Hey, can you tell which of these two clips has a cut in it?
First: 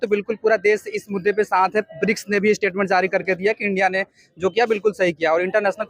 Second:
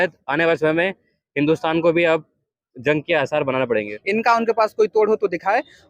second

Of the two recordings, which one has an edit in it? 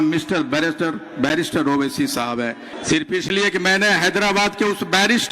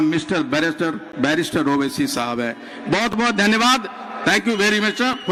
first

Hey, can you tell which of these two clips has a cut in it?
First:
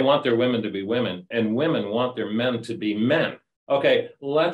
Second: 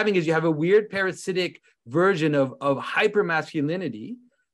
first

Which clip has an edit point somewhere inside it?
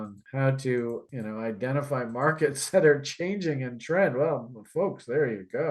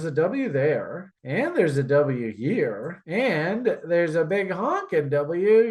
first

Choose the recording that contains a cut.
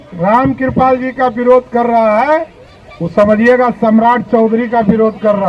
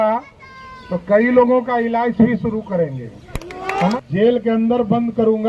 second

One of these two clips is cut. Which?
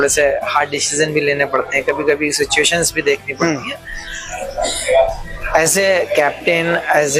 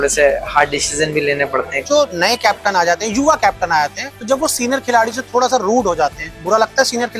second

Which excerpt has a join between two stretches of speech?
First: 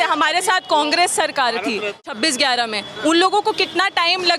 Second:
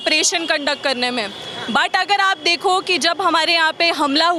first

